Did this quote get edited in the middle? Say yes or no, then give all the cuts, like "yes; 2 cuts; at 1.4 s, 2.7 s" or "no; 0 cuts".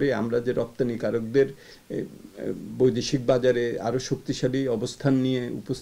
no; 0 cuts